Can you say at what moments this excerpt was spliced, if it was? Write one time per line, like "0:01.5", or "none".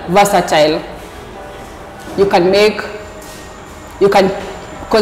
none